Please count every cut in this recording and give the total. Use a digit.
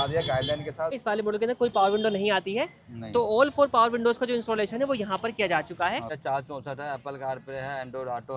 2